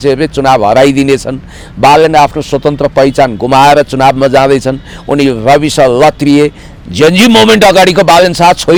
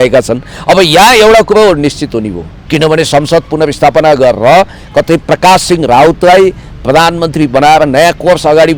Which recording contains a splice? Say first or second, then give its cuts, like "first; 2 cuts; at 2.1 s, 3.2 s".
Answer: second; 1 cut; at 2.6 s